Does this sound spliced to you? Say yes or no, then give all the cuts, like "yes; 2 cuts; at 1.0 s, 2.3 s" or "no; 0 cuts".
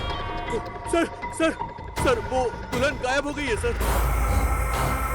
yes; 1 cut; at 3.8 s